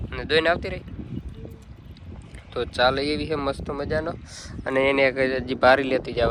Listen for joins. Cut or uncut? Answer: uncut